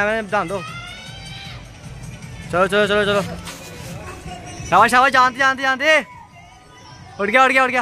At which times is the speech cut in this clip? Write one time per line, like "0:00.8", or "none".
0:02.4